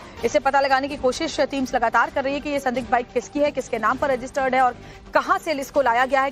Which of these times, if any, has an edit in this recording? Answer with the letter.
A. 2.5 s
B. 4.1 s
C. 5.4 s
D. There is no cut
A